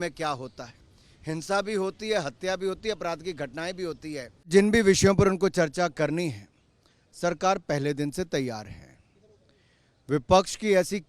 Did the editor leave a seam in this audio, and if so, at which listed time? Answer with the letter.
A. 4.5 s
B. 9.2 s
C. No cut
A